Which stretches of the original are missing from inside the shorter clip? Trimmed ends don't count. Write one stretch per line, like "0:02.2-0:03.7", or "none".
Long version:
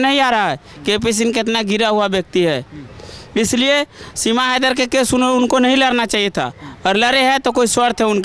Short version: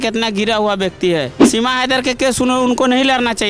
0:02.7-0:04.1